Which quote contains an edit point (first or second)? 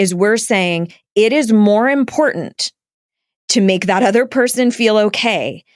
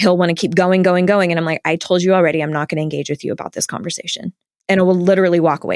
second